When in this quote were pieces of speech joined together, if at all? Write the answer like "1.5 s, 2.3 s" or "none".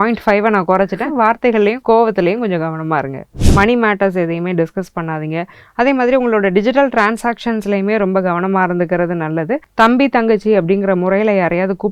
3.3 s, 9.7 s